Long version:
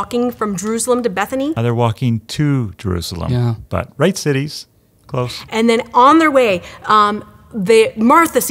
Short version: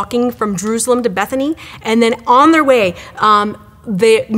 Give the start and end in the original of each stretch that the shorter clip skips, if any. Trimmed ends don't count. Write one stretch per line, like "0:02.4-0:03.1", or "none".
0:01.6-0:05.3